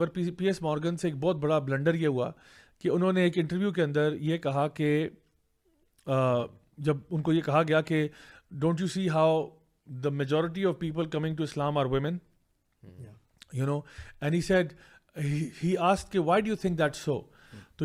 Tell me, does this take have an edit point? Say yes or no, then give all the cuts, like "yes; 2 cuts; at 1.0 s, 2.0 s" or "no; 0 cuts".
no; 0 cuts